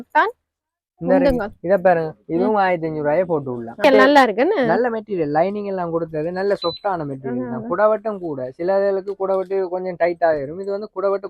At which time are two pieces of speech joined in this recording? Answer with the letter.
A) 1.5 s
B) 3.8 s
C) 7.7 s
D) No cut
B